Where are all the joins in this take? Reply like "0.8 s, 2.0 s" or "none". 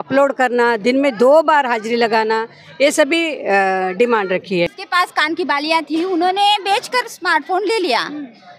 4.7 s